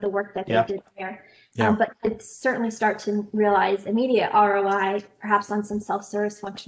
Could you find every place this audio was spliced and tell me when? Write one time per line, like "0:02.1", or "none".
none